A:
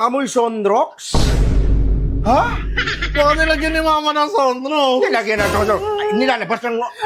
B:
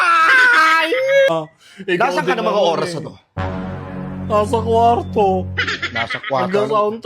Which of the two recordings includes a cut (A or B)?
B